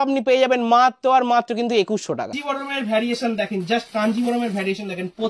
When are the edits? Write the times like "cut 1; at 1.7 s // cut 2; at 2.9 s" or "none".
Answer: cut 1; at 2.5 s

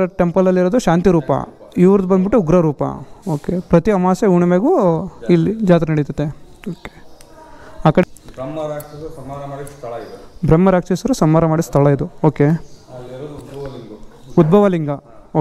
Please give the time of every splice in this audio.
cut 1; at 8.0 s

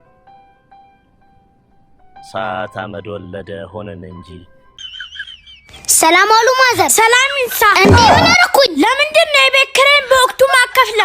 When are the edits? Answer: cut 1; at 4.8 s

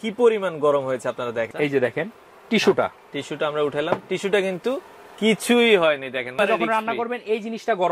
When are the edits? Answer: cut 1; at 1.5 s // cut 2; at 6.3 s

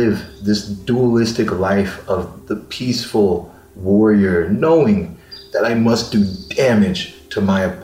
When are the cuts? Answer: none

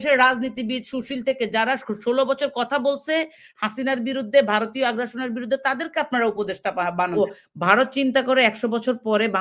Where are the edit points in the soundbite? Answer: cut 1; at 7.1 s

